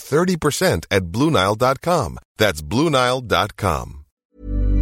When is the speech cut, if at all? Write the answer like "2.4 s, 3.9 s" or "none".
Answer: none